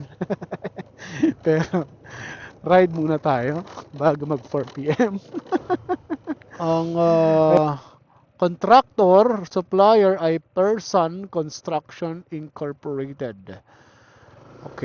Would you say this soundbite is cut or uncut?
cut